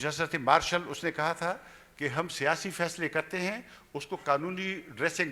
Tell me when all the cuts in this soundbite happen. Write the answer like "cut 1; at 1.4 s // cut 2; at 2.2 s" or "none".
none